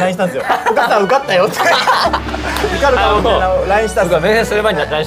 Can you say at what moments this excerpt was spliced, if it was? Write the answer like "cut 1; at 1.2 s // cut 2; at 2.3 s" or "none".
none